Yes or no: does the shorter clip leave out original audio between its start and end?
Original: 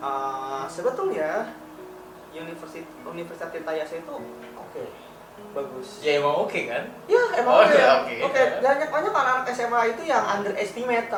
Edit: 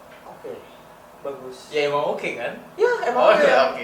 no